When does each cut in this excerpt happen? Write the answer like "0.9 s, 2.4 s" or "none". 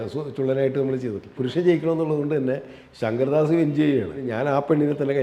1.3 s, 4.2 s